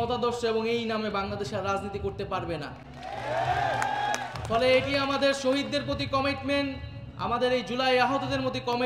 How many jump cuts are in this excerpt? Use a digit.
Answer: 0